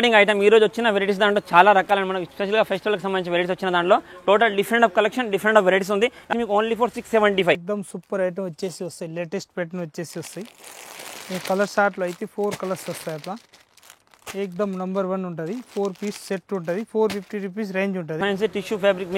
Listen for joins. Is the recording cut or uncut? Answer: cut